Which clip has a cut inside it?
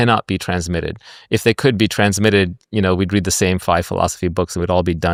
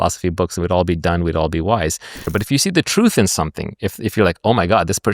second; 1 cut; at 2.2 s

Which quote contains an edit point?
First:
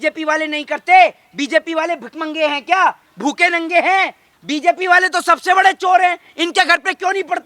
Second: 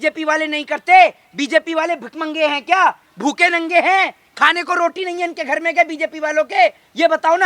first; 1 cut; at 4.2 s

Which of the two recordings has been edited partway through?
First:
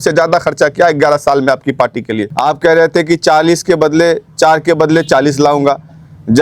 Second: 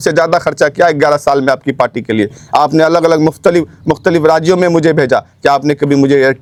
first; 1 cut; at 2.2 s

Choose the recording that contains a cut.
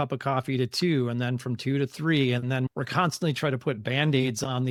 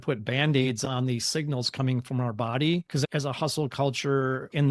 second; 1 cut; at 2.9 s

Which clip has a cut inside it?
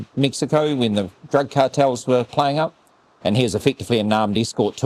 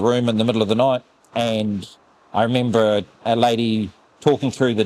second; 1 cut; at 1.2 s

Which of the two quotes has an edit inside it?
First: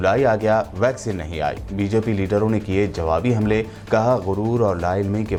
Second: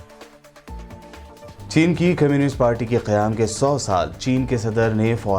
second; 1 cut; at 0.9 s

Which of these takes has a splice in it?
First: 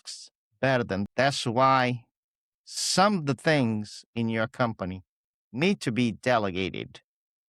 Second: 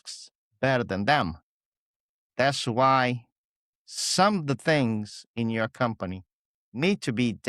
first; 1 cut; at 1.0 s

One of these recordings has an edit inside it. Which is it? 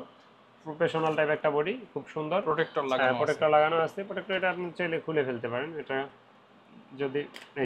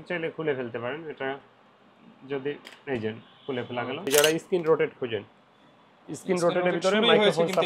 second; 1 cut; at 4.1 s

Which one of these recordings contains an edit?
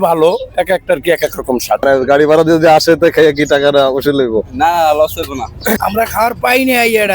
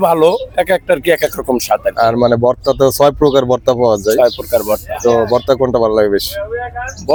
first; 2 cuts; at 1.8 s, 5.8 s

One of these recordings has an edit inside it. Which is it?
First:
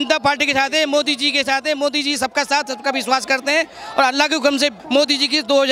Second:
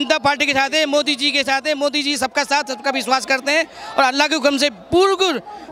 first; 1 cut; at 4.8 s

